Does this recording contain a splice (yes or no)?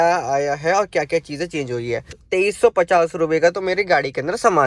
yes